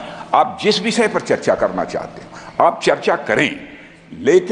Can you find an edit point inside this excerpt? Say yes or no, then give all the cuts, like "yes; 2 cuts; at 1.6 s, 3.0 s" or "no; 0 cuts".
no; 0 cuts